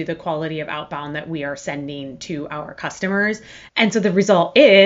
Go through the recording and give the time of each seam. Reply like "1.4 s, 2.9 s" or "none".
3.6 s